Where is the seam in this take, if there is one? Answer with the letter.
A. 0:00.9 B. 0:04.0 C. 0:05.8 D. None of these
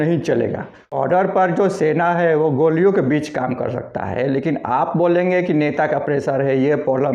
A